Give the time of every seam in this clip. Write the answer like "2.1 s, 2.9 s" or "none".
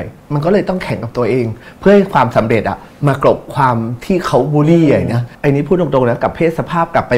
5.3 s